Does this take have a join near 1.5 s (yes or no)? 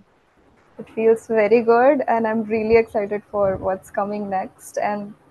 no